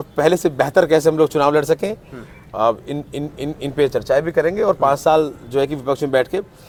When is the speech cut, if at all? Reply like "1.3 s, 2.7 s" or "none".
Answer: none